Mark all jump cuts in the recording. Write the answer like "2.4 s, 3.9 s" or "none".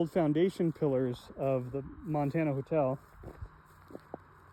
none